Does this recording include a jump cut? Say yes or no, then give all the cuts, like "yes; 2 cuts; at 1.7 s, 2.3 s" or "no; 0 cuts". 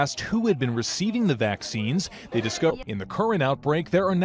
no; 0 cuts